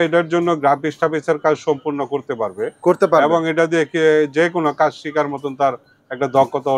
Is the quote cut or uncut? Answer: uncut